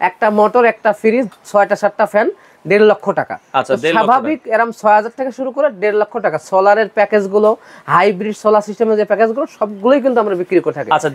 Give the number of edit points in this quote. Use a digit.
0